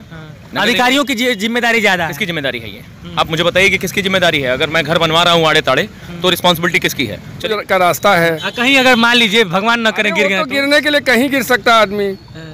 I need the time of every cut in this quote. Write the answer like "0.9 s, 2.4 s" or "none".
7.5 s